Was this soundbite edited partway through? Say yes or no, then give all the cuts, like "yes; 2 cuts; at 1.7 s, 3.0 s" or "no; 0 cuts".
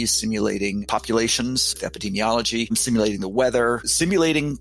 no; 0 cuts